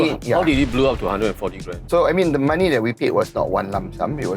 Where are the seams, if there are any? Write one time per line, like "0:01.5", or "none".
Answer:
0:01.8

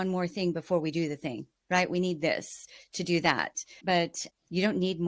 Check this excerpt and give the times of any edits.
0:03.9

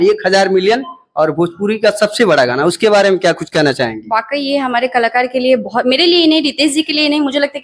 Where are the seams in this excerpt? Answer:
none

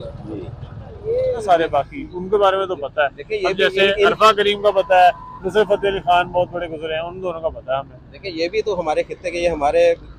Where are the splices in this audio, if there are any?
0:01.4

